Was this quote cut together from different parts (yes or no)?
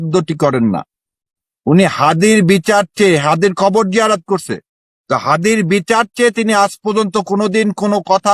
no